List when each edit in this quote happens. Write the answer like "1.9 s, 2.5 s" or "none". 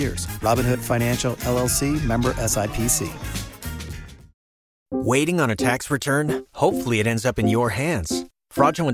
4.8 s